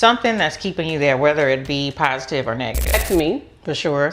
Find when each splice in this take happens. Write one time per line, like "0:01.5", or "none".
0:02.9